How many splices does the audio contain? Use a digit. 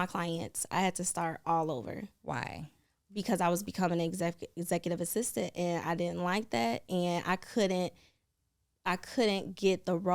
0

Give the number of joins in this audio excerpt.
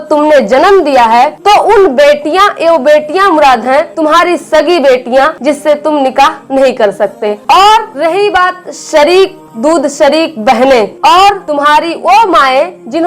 4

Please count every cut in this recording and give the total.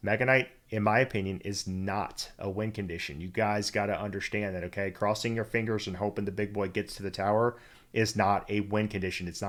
0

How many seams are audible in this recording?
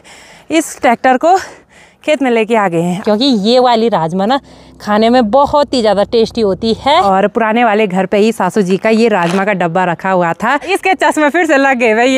3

